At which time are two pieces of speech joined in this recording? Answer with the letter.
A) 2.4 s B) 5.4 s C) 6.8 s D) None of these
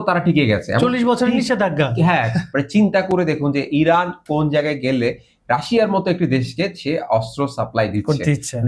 A